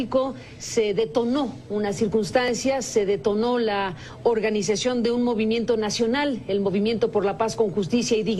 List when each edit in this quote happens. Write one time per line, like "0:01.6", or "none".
0:02.8